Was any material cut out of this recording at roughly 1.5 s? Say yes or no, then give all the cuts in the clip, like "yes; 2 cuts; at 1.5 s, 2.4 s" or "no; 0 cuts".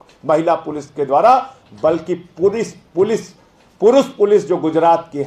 no; 0 cuts